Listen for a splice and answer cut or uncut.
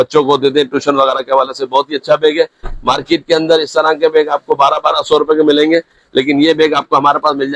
uncut